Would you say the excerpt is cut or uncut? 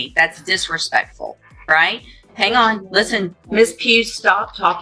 cut